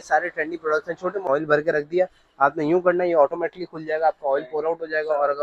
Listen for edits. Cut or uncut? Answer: cut